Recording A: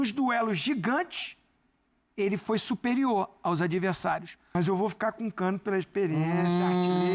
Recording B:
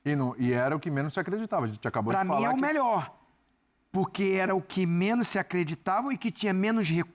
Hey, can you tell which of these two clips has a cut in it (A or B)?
A